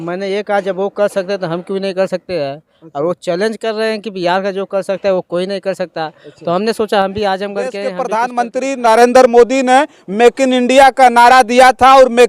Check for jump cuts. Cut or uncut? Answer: cut